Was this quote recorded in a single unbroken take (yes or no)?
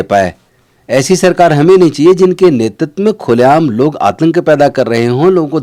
yes